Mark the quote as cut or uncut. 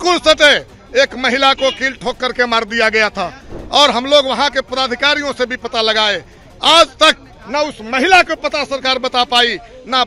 uncut